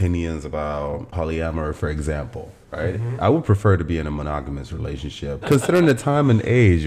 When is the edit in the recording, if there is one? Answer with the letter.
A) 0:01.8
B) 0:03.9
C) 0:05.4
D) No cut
C